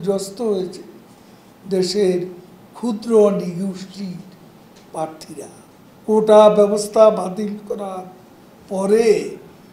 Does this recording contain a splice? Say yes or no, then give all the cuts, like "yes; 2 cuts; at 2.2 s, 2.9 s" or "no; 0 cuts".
yes; 1 cut; at 5.6 s